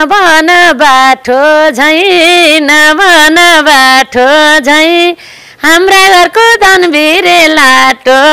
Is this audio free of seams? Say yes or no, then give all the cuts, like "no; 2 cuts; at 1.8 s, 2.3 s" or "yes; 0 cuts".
yes; 0 cuts